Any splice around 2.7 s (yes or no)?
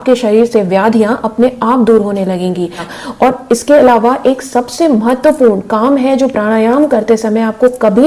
no